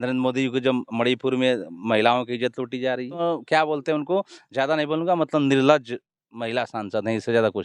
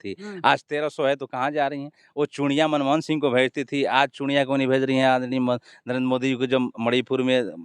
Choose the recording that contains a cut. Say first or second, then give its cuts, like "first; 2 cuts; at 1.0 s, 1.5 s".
first; 1 cut; at 3.2 s